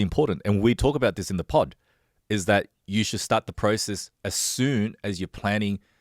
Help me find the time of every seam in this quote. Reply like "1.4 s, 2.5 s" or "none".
none